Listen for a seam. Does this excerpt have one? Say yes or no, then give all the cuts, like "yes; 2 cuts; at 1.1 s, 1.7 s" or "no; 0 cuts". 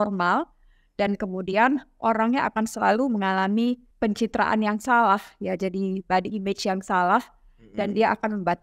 yes; 1 cut; at 3.9 s